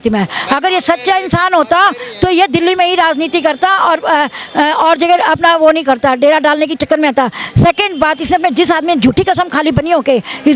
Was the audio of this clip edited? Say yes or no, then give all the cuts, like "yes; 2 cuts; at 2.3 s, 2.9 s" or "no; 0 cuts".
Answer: no; 0 cuts